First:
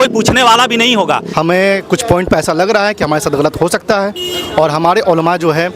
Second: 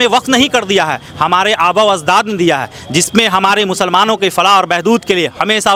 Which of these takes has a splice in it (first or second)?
first